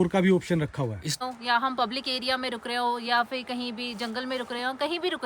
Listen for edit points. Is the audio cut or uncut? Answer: cut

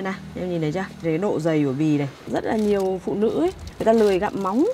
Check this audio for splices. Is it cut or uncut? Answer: cut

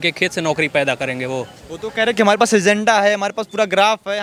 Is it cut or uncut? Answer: uncut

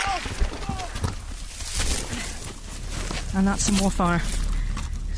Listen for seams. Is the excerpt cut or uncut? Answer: uncut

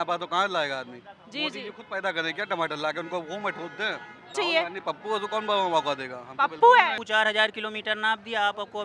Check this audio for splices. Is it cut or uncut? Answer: cut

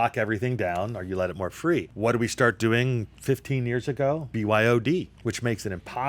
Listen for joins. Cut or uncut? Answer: cut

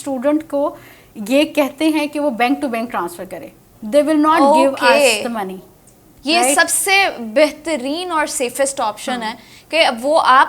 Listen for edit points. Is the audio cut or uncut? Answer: uncut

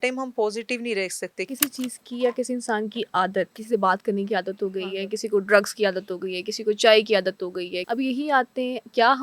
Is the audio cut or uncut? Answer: cut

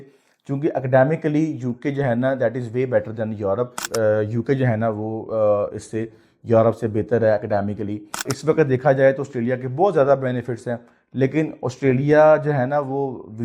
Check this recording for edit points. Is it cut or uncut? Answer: cut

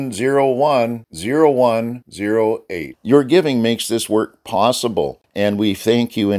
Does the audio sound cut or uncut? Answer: cut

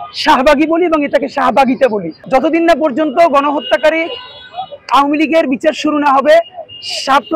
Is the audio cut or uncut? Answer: cut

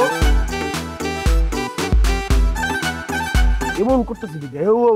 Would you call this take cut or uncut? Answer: cut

